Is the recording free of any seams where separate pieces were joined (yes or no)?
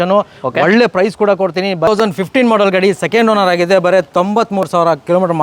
no